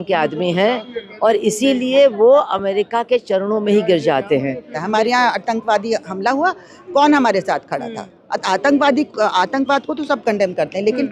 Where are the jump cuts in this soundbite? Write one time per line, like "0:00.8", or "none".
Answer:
0:04.7